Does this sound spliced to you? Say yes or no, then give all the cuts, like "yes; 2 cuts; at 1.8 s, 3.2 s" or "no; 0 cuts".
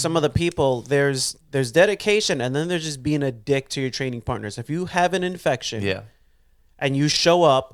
no; 0 cuts